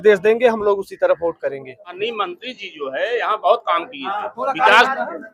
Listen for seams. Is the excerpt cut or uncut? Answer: cut